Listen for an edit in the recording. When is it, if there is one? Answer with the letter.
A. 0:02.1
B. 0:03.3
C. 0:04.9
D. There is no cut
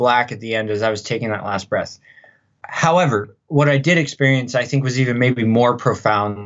D